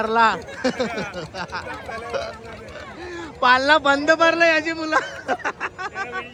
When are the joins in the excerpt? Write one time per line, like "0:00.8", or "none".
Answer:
none

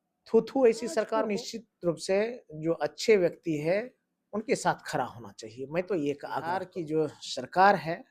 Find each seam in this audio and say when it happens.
0:01.2
0:06.7

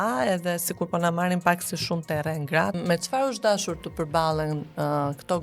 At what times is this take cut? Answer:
0:02.8

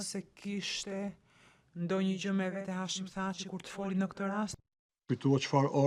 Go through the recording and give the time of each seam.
none

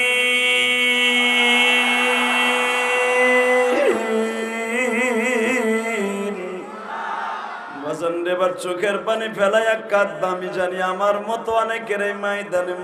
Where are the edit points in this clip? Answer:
0:07.7

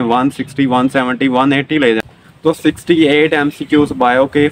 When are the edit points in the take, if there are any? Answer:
0:02.1

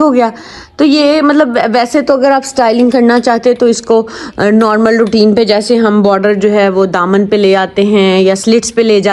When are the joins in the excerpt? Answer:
none

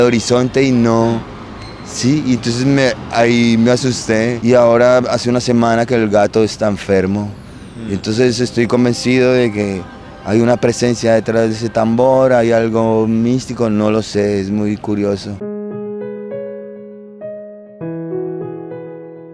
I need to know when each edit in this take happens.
none

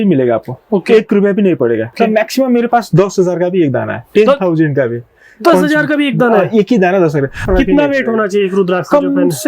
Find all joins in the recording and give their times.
0:01.9
0:07.4

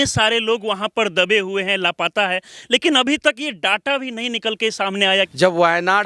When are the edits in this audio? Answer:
0:05.2

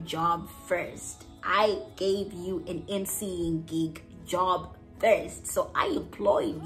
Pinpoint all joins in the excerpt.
none

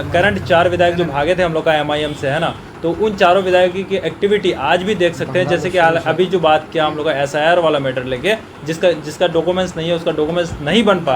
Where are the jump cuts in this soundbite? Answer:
none

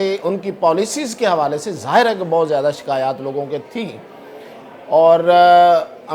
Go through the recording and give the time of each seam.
none

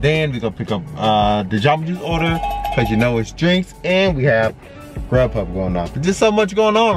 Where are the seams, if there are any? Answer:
none

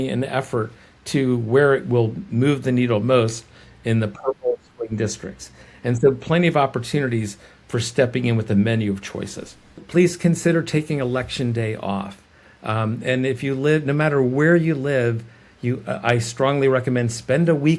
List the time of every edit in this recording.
0:09.8

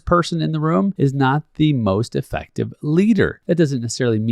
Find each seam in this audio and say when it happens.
0:00.9
0:03.4

